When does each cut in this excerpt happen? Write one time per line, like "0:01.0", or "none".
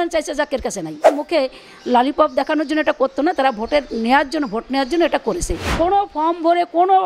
0:01.0
0:05.6